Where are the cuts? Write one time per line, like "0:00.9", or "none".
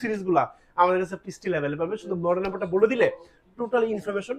none